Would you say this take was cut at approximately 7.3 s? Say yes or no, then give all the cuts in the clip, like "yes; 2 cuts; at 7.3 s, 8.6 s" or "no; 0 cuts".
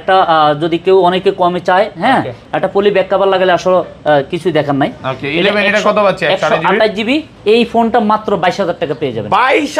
yes; 1 cut; at 7.3 s